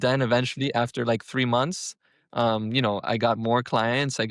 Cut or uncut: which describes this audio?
uncut